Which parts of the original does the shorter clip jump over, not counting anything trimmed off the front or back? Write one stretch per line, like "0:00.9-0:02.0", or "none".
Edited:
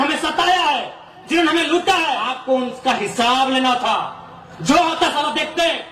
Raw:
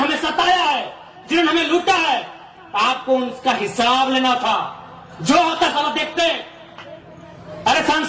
0:02.3-0:02.9